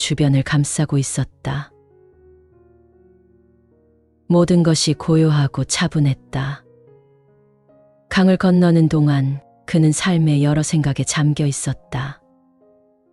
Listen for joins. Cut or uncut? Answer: cut